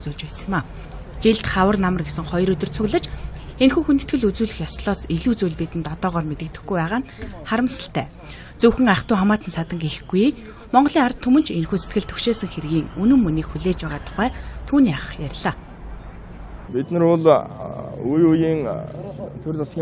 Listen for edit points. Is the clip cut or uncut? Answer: uncut